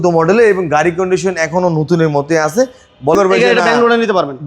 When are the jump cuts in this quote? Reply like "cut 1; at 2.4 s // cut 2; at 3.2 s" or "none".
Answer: cut 1; at 3.1 s

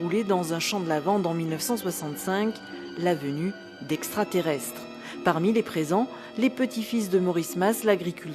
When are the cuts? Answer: none

